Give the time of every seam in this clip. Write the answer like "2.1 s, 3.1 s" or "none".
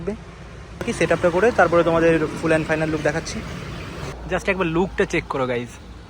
0.9 s, 4.1 s